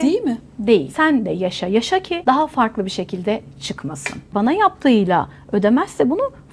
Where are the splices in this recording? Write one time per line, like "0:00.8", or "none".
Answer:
0:00.9
0:02.1
0:04.3